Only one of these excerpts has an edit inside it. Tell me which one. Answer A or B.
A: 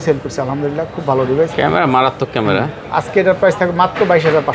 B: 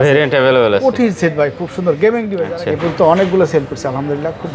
B